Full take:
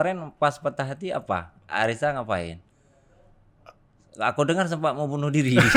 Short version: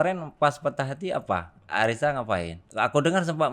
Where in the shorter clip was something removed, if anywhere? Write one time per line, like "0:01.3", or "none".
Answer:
0:02.6

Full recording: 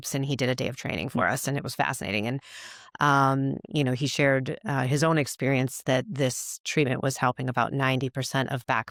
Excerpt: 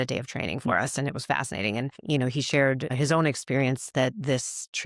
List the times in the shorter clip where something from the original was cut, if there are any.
0:02.0
0:02.9

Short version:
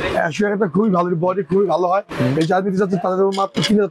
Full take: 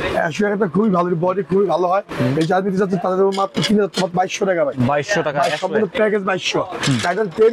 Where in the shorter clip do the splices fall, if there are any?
none

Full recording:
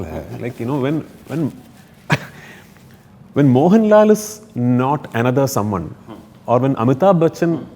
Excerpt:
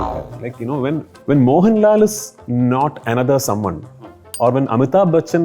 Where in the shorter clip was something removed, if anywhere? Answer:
0:01.1

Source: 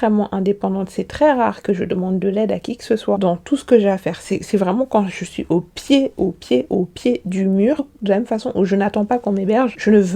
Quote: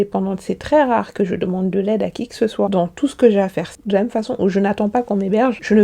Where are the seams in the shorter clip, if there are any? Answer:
0:03.7

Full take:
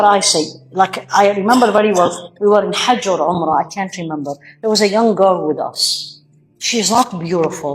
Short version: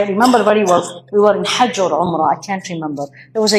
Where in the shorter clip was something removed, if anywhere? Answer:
none

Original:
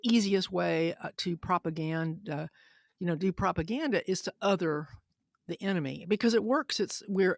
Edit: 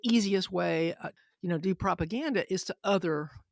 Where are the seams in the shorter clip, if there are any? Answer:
0:01.1

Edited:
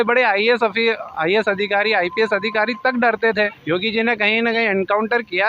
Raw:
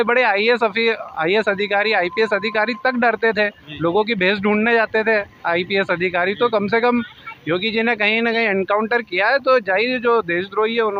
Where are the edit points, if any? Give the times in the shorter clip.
0:03.6

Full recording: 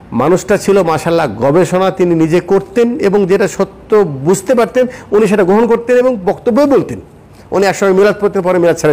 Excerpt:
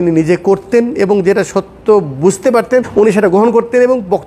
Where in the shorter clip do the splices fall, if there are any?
0:02.9

